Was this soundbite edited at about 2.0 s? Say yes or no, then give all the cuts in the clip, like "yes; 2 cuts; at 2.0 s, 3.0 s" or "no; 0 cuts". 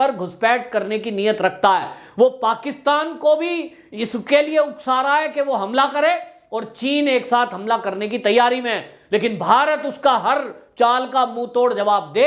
no; 0 cuts